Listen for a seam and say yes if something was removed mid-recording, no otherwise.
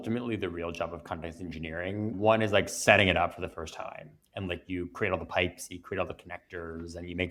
no